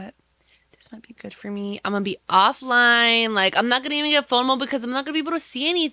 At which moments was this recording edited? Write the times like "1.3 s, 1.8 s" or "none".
none